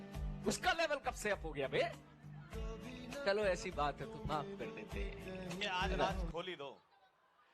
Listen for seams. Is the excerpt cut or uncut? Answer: cut